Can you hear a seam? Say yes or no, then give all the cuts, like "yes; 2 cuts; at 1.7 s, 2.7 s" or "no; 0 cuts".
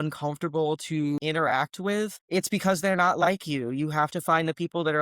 yes; 2 cuts; at 1.2 s, 2.2 s